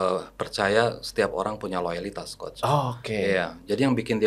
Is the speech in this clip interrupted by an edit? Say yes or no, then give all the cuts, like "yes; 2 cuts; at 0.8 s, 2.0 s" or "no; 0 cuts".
no; 0 cuts